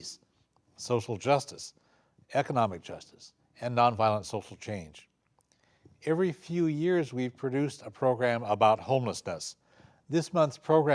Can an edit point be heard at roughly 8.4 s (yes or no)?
yes